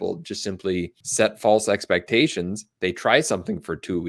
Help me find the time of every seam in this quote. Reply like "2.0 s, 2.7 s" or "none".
1.0 s